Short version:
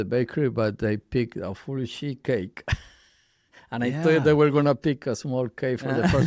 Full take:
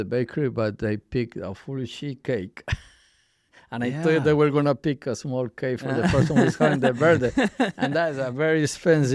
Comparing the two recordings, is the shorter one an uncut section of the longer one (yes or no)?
yes